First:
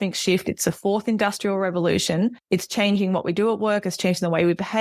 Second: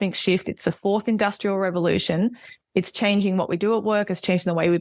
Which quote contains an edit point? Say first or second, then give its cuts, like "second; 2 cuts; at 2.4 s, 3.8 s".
first; 1 cut; at 2.4 s